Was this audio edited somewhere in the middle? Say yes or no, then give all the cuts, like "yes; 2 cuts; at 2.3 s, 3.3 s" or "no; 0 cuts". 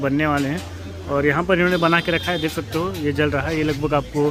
no; 0 cuts